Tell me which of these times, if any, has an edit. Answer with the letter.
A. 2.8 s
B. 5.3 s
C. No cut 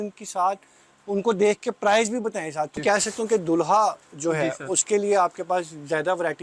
A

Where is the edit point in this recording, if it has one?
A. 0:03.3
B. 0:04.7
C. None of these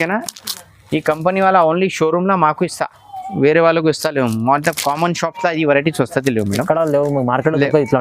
C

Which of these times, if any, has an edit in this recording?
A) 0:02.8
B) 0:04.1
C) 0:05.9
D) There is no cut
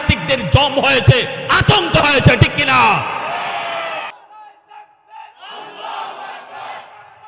B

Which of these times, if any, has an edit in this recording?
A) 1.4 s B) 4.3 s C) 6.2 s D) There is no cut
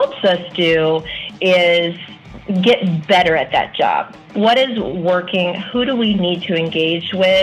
B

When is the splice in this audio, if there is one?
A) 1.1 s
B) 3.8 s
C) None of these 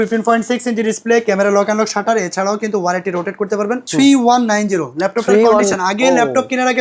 B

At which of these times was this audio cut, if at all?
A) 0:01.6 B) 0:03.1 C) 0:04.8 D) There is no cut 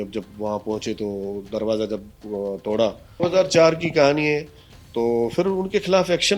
B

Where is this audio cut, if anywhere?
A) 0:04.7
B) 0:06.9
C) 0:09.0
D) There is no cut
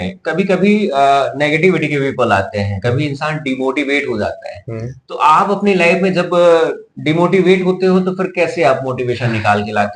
D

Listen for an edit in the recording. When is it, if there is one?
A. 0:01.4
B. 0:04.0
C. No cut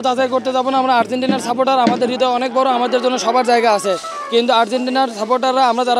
C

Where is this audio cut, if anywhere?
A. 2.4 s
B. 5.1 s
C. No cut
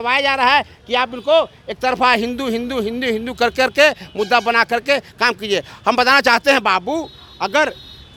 C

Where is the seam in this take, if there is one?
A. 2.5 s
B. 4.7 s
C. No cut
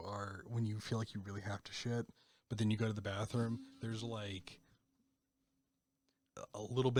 C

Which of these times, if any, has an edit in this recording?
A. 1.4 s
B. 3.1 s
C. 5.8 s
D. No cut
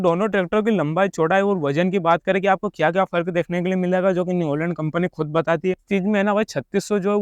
C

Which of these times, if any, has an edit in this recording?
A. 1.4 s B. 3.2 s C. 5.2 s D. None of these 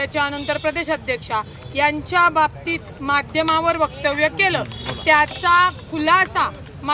D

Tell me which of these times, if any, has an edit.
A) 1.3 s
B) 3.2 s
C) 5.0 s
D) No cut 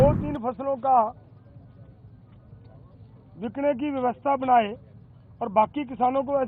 D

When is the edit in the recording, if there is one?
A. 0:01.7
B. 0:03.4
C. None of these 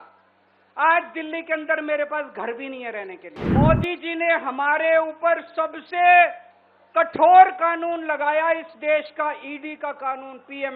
B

